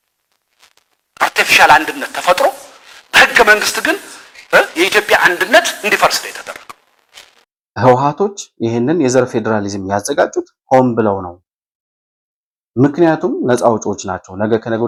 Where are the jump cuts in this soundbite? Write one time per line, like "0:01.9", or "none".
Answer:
none